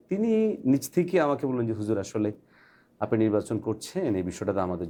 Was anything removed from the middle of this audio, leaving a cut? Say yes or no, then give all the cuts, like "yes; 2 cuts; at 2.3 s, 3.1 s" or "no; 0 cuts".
no; 0 cuts